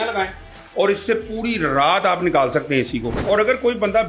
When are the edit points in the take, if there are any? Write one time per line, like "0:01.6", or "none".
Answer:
0:03.1